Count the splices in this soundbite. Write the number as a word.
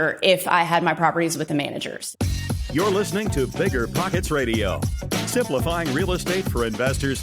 one